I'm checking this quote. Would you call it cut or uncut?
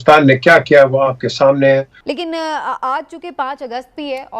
cut